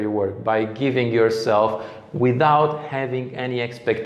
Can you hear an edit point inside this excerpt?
no; 0 cuts

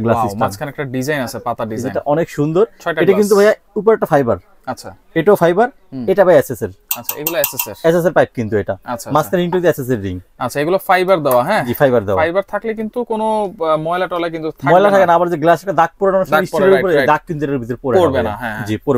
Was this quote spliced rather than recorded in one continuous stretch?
no; 0 cuts

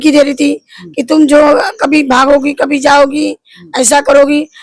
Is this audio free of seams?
yes; 0 cuts

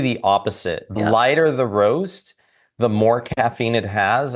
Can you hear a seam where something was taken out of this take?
yes; 1 cut; at 1.0 s

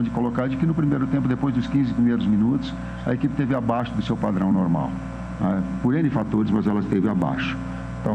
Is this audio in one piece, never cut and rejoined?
yes; 0 cuts

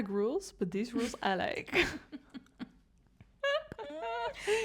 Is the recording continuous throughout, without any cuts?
yes; 0 cuts

